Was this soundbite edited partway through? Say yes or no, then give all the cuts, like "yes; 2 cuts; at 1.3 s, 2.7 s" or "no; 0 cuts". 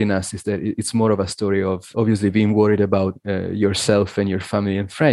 yes; 1 cut; at 3.2 s